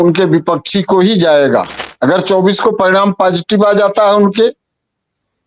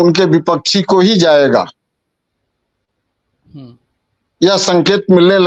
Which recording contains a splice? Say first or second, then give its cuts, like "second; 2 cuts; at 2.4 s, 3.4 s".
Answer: first; 1 cut; at 1.8 s